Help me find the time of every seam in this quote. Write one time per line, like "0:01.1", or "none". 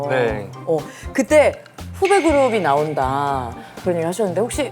0:01.8
0:03.5